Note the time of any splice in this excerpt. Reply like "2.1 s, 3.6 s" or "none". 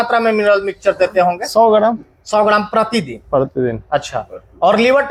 none

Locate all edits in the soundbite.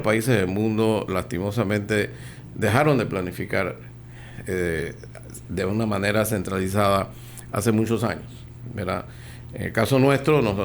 none

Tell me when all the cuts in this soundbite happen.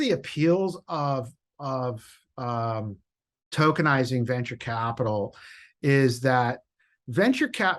none

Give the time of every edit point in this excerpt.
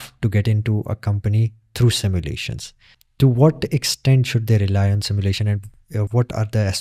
none

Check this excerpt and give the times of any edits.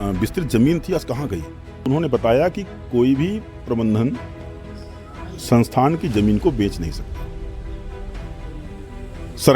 1.8 s

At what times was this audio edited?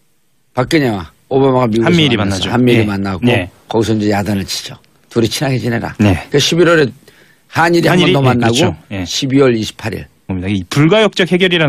none

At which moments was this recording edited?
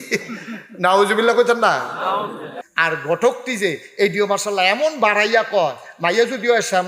2.5 s

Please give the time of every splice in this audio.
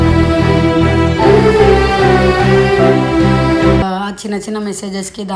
3.8 s

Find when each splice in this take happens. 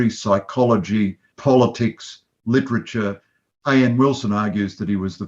1.3 s

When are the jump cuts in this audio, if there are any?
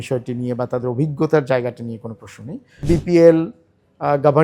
2.8 s

